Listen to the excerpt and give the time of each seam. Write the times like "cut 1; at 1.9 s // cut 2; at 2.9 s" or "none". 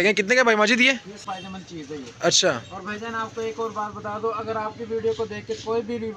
cut 1; at 1.2 s